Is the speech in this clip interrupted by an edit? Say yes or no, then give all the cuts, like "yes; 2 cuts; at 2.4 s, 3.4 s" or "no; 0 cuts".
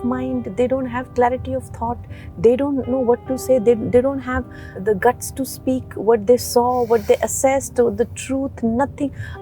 yes; 1 cut; at 4.7 s